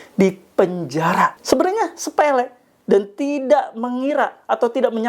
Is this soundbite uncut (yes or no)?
no